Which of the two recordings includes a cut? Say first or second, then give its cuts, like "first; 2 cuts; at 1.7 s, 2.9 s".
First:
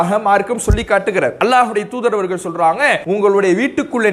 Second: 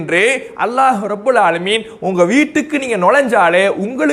first; 2 cuts; at 1.3 s, 3.0 s